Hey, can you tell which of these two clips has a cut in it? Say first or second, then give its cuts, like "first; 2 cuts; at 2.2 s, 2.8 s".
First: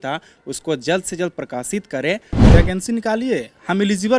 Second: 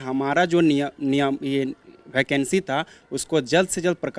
first; 1 cut; at 2.5 s